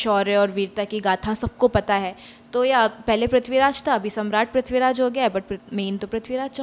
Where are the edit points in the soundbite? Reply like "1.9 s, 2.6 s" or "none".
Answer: none